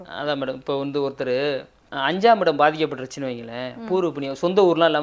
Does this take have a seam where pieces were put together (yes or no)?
no